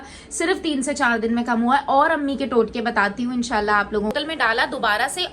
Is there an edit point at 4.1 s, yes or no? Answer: yes